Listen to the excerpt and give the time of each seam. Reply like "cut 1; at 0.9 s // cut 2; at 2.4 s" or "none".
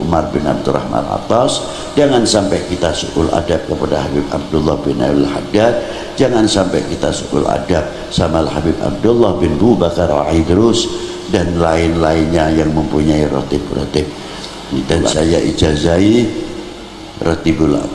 cut 1; at 14.8 s